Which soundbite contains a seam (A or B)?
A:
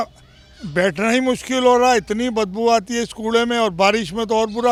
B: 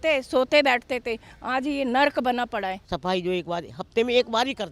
B